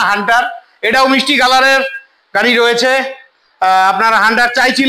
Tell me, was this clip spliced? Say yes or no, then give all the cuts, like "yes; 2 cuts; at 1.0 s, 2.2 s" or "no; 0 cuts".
no; 0 cuts